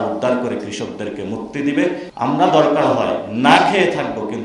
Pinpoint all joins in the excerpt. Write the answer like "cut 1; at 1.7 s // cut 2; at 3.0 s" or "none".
cut 1; at 2.1 s